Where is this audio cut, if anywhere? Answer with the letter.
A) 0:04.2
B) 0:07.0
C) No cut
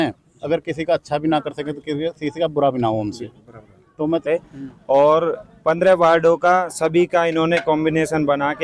A